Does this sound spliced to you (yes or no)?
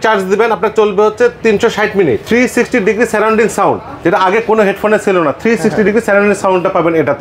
yes